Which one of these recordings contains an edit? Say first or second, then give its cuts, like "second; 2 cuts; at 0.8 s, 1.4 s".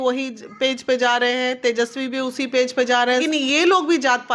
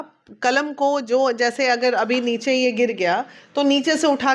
first; 1 cut; at 3.2 s